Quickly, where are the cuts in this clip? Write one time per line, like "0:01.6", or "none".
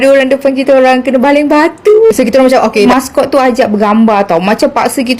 0:02.9